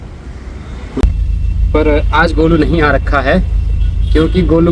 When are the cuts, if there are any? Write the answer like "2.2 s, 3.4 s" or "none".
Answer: 1.0 s